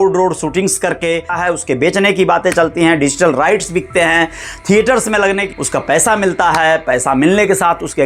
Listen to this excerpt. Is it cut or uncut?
cut